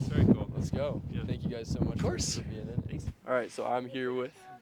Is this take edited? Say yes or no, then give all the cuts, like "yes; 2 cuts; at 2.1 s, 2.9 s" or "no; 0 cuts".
no; 0 cuts